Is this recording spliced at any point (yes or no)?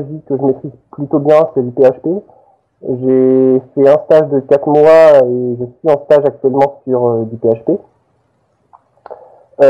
no